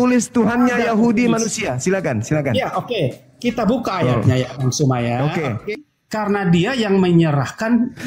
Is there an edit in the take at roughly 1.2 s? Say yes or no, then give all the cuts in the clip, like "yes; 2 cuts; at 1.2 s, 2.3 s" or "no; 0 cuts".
no; 1 cut; at 5.8 s